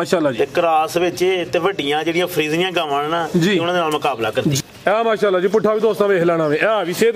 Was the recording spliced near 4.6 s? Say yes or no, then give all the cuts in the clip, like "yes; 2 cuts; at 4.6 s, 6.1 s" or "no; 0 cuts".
yes; 1 cut; at 4.6 s